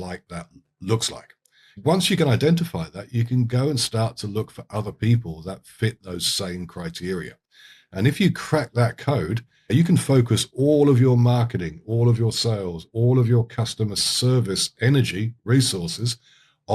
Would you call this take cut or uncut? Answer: cut